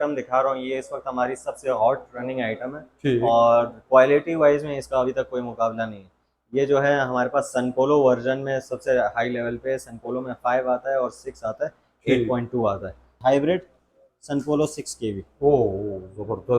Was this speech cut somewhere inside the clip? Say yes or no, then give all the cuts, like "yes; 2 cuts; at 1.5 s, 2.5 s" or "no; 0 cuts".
yes; 1 cut; at 13.1 s